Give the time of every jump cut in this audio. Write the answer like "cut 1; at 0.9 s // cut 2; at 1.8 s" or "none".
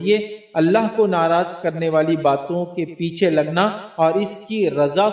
none